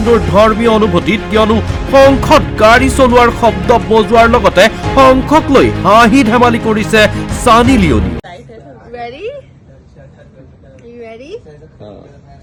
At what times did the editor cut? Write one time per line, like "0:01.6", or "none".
none